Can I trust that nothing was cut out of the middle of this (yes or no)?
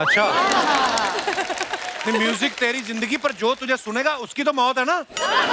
yes